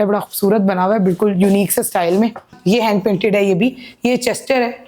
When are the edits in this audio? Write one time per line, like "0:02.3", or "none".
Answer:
0:02.6